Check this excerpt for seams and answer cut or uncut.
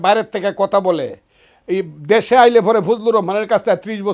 uncut